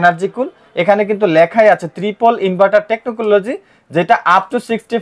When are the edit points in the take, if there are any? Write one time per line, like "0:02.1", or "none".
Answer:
none